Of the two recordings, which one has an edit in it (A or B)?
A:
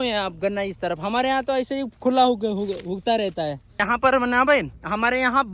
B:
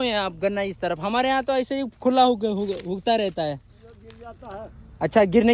A